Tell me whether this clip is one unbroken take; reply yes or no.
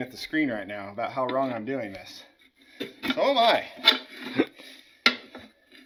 yes